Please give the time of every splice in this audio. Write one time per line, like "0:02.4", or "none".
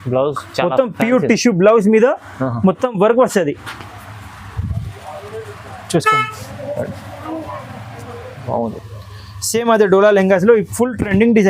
0:08.7